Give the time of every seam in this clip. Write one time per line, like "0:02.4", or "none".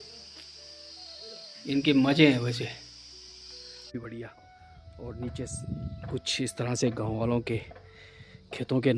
0:03.9